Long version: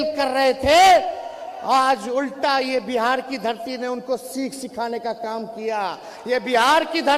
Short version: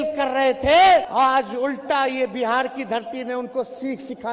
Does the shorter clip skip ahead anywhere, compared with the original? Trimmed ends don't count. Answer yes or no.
yes